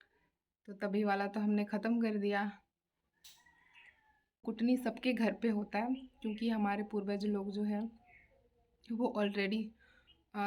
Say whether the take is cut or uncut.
cut